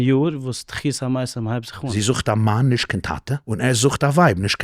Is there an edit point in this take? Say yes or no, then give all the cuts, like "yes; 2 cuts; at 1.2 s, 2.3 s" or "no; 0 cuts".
yes; 2 cuts; at 1.9 s, 3.4 s